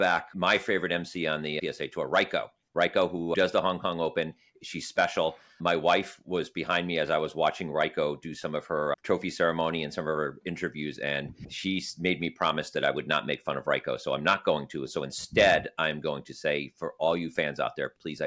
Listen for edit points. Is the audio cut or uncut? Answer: cut